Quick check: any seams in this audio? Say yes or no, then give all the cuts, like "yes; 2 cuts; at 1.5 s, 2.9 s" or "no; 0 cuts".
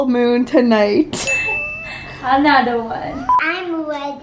yes; 1 cut; at 3.3 s